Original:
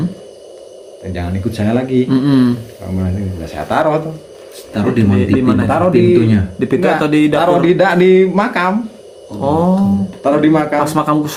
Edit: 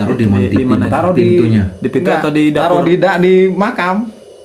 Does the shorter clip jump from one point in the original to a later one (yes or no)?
no